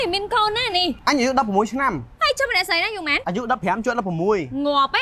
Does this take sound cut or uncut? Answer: cut